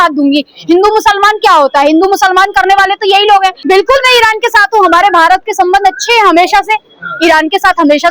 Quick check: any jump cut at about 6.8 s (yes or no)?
no